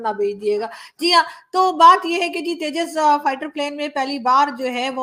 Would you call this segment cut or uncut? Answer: uncut